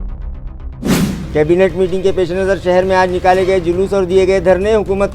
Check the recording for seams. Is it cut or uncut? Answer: cut